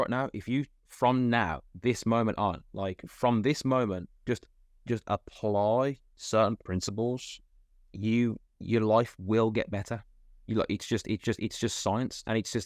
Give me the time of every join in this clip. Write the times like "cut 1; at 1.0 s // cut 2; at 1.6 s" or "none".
cut 1; at 6.1 s